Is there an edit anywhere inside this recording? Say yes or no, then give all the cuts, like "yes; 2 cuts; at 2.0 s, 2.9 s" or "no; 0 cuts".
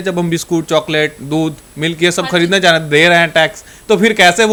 no; 0 cuts